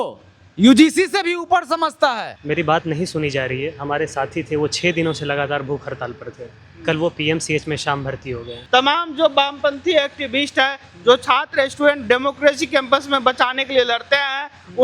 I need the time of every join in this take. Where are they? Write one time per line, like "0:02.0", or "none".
0:02.3
0:08.5